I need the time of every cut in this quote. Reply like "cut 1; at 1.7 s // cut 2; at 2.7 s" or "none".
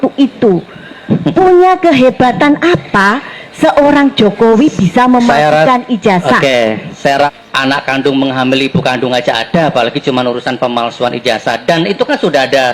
cut 1; at 7.3 s